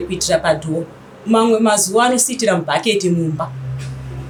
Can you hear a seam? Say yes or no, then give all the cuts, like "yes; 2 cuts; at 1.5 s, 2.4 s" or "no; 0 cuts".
no; 0 cuts